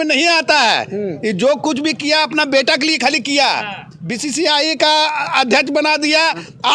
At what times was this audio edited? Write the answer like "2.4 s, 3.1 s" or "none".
none